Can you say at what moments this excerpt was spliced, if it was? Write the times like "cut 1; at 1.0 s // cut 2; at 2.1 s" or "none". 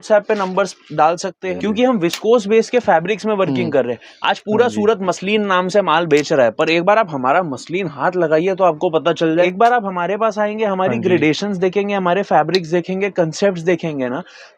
cut 1; at 1.5 s // cut 2; at 9.5 s